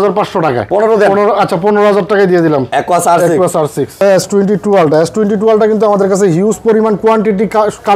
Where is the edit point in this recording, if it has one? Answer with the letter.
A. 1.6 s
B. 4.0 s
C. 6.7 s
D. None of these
B